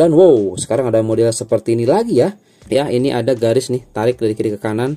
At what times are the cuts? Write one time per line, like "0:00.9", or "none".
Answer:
0:02.5